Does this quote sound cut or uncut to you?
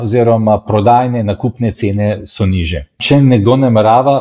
cut